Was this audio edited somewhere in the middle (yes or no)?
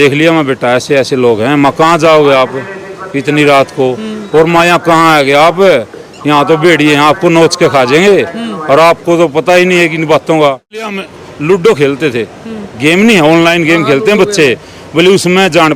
yes